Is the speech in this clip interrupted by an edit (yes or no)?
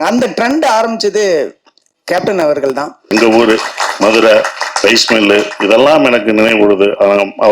yes